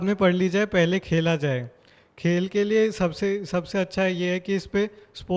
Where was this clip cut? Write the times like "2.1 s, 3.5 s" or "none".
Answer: none

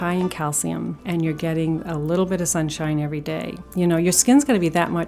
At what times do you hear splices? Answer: 1.0 s, 3.6 s

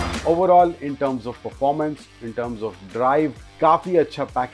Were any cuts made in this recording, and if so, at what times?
3.4 s

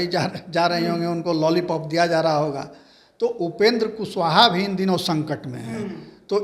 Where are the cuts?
none

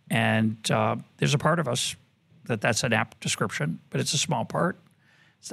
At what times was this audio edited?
none

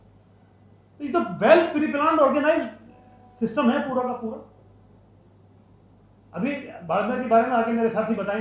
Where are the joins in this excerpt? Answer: none

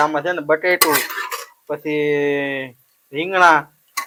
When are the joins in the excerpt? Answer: none

